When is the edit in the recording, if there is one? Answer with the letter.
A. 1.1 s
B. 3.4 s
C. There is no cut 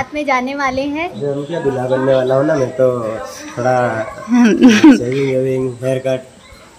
A